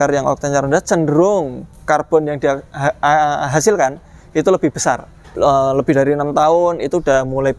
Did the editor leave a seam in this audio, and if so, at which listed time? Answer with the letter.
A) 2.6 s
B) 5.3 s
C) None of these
B